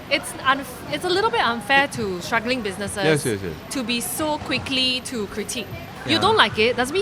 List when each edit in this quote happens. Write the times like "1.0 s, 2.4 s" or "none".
5.9 s